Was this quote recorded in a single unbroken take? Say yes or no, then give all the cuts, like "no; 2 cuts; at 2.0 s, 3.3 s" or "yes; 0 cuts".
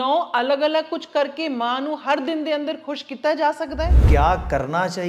no; 1 cut; at 4.0 s